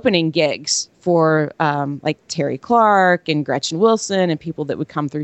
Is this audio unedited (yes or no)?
yes